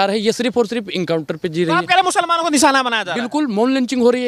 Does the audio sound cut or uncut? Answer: uncut